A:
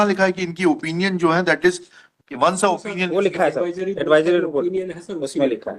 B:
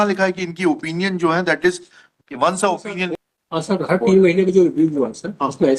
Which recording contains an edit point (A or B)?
B